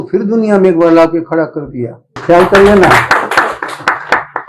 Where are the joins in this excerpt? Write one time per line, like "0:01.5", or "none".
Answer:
0:02.2

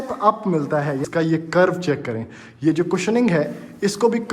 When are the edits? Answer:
0:01.0

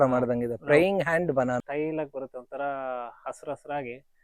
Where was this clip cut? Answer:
0:01.7

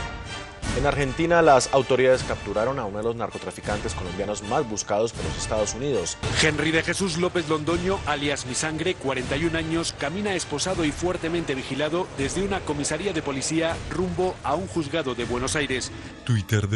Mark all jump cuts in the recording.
0:06.2

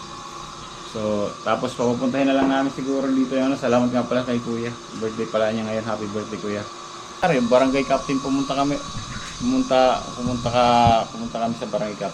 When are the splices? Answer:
0:07.2

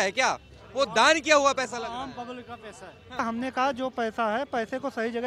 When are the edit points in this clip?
0:03.2

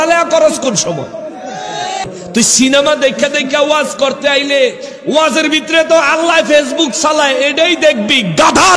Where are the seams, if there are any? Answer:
0:02.1

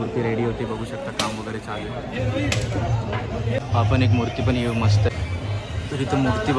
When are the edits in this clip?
0:03.6
0:05.1

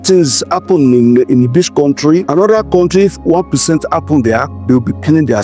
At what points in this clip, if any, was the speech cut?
0:02.3
0:04.5

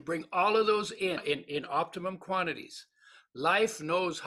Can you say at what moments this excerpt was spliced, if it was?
0:01.2

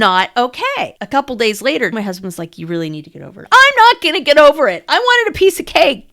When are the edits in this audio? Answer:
0:01.0
0:01.9
0:03.4

